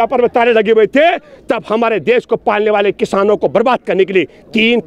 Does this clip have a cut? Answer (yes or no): no